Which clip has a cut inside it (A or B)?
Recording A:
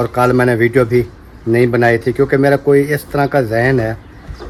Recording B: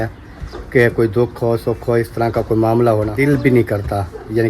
B